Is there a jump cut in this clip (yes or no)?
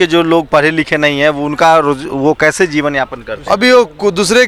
no